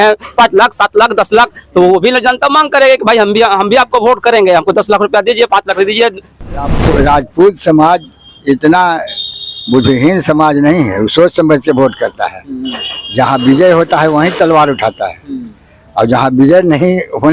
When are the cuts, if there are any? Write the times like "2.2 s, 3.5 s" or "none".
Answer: 6.8 s